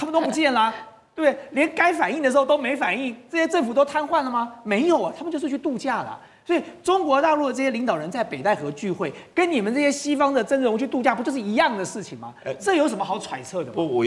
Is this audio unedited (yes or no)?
yes